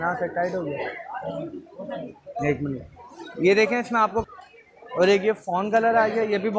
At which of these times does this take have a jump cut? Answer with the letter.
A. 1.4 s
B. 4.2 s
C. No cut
B